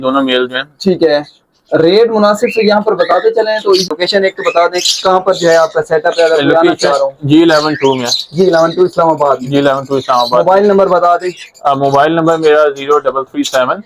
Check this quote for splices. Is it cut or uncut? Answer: cut